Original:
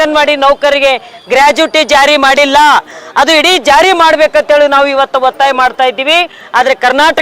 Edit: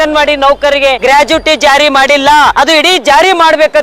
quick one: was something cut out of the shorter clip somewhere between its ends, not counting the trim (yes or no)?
yes